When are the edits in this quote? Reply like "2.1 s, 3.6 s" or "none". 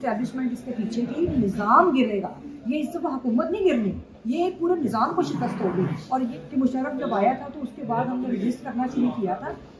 1.3 s, 6.3 s

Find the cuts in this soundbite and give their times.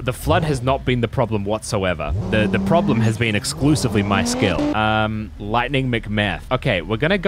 2.2 s, 4.7 s

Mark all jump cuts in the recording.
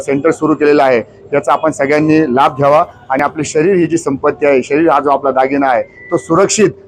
none

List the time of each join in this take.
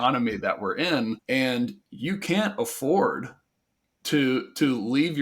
1.2 s

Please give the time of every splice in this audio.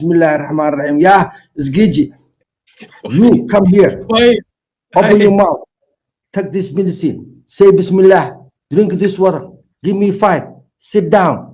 2.2 s

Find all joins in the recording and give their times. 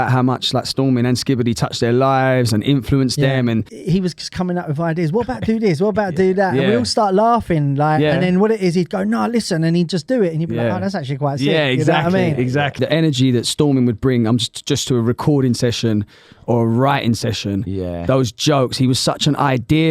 3.7 s, 12.8 s

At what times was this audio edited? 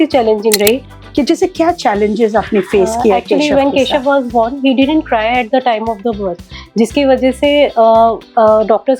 0.9 s

